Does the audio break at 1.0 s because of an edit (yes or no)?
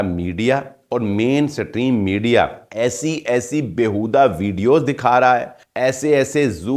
no